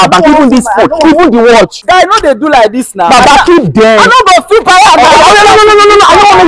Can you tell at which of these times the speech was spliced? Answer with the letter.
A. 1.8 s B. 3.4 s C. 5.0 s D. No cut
A